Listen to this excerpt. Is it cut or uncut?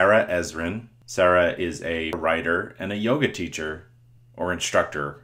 cut